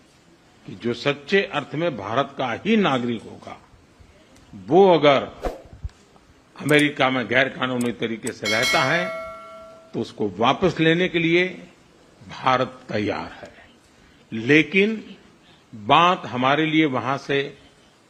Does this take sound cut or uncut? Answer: uncut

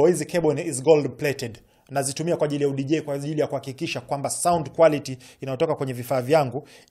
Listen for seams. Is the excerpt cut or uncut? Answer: uncut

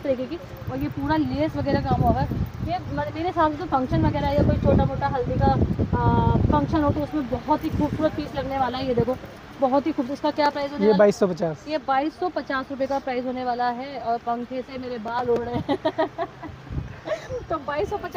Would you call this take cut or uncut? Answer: uncut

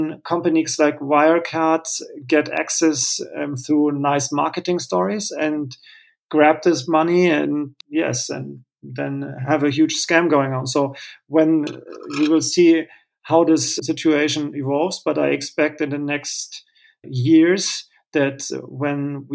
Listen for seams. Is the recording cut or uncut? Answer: uncut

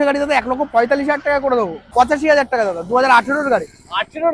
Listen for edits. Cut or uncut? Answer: cut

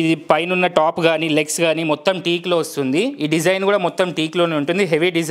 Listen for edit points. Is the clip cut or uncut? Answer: uncut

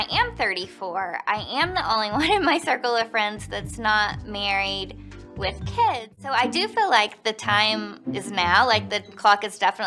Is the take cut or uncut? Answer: cut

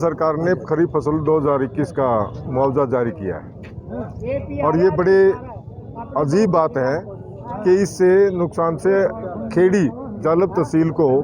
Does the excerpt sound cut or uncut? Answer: uncut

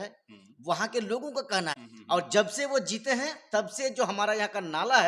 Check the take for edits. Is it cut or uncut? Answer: cut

